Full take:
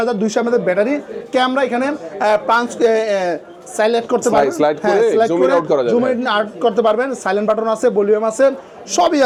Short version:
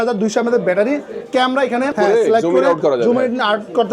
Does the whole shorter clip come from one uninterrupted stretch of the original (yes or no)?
no